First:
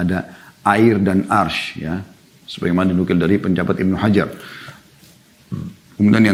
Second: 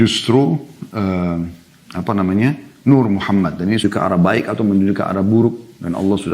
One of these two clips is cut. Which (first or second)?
second